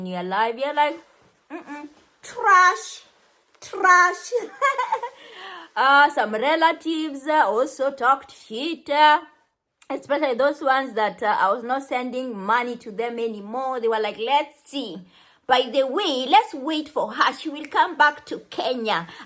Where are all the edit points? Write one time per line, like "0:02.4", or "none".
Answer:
none